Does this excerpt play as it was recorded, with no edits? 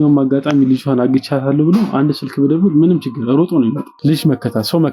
no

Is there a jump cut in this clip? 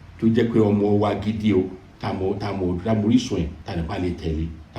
yes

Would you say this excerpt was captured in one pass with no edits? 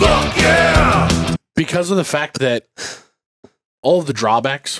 no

